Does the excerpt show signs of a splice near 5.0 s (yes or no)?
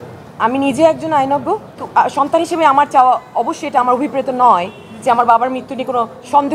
no